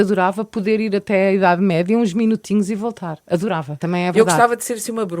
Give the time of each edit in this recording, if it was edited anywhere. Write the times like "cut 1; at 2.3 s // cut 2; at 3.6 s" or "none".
cut 1; at 3.8 s